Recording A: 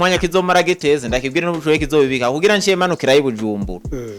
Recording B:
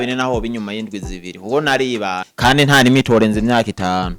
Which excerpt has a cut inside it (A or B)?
B